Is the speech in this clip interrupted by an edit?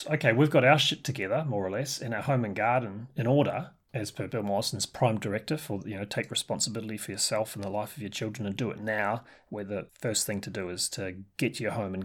no; 0 cuts

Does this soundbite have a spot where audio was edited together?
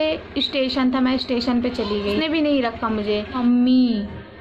yes; 2 cuts; at 2.2 s, 3.4 s

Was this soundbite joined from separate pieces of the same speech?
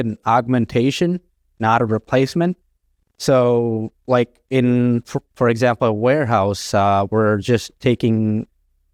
no; 0 cuts

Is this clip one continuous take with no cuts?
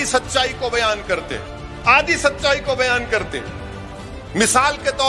yes; 0 cuts

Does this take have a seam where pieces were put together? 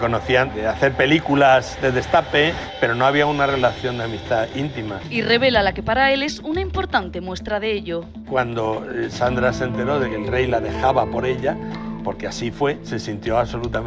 no; 0 cuts

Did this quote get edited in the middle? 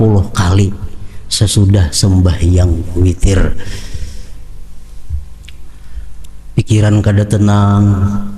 no; 0 cuts

